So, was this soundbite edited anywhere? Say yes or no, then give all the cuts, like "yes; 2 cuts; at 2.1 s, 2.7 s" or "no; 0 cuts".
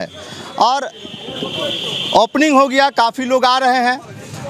no; 0 cuts